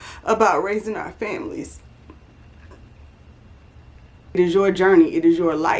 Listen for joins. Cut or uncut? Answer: cut